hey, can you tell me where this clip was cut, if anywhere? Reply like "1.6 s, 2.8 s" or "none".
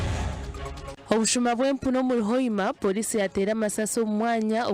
0.9 s